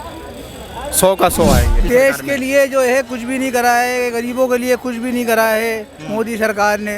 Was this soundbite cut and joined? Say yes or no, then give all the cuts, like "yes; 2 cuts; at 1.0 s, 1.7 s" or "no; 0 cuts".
yes; 1 cut; at 1.8 s